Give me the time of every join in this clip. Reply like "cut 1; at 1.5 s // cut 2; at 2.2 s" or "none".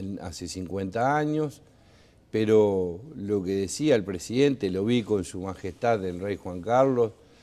cut 1; at 5.3 s